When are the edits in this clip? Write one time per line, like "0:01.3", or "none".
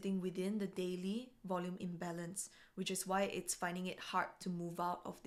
none